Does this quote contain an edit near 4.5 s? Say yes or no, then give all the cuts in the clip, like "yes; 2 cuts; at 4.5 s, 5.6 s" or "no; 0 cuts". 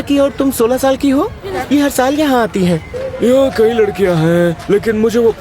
no; 2 cuts; at 1.5 s, 3.0 s